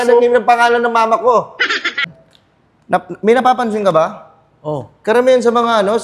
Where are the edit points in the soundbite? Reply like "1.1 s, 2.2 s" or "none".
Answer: 2.1 s